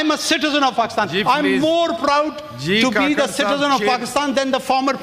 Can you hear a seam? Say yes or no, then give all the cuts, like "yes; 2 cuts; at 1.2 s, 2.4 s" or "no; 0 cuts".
no; 0 cuts